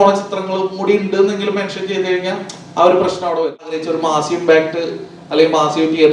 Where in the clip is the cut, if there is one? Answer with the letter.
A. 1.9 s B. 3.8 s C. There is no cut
B